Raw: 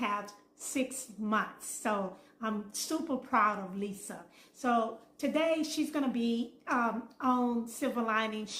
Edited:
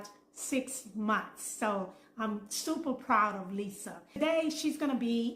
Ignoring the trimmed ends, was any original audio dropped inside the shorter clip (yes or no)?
yes